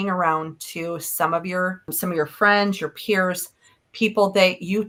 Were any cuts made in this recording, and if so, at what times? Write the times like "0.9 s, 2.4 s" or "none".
none